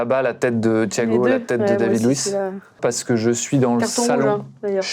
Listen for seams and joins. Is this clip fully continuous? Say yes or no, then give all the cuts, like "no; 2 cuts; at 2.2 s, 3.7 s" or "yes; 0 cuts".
no; 1 cut; at 2.8 s